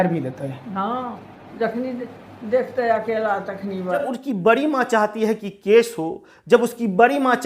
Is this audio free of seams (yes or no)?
no